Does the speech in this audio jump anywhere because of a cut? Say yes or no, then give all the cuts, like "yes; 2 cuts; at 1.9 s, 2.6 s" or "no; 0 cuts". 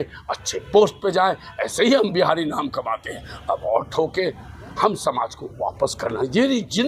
no; 0 cuts